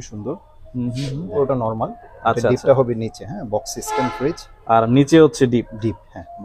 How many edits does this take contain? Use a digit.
2